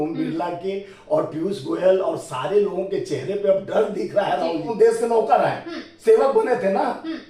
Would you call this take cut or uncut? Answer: cut